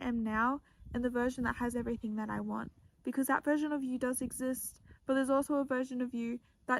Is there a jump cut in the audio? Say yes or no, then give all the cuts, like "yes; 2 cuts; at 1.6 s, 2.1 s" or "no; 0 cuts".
no; 0 cuts